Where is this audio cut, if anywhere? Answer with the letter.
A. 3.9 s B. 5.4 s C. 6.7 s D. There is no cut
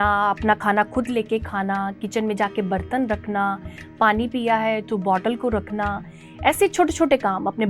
D